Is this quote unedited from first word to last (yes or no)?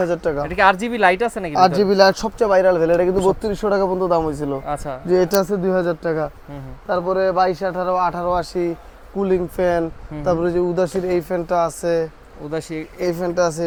yes